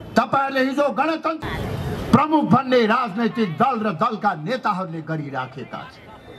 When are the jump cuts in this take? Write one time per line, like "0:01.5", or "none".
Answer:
0:01.4